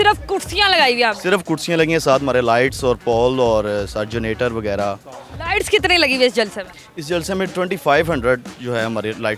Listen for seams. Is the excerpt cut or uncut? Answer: uncut